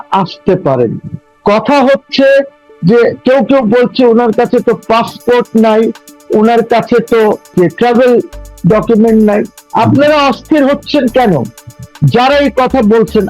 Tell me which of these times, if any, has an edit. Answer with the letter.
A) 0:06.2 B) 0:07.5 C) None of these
B